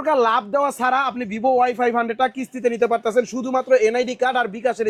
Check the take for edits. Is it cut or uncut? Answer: uncut